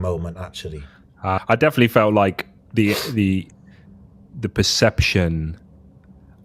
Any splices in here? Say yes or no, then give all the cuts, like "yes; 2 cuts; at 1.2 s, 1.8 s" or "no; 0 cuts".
yes; 1 cut; at 1.4 s